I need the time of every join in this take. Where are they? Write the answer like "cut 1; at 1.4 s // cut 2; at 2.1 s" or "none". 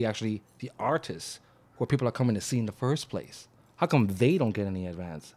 none